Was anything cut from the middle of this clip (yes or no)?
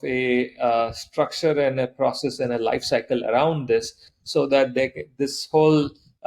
no